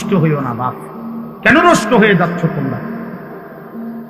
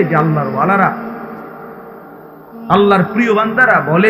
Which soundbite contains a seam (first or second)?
first